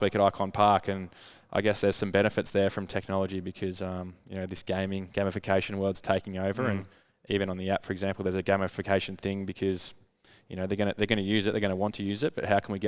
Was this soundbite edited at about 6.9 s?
no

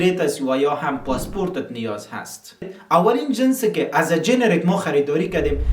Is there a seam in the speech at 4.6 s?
no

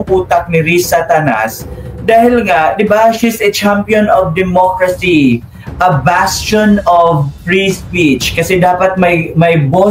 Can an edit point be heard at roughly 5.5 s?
no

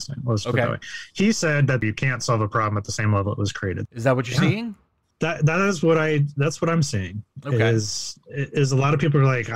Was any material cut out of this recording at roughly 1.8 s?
yes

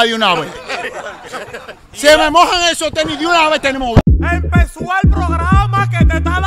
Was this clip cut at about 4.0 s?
yes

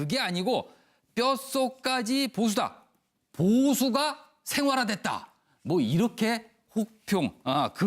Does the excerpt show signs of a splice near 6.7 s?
yes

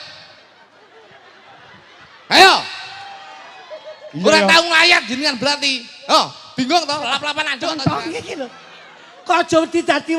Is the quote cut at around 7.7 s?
yes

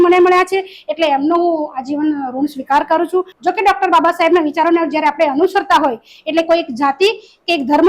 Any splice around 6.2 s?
no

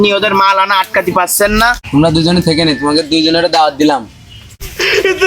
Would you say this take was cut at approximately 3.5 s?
no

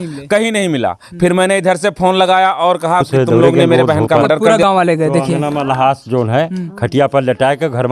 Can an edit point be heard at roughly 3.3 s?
no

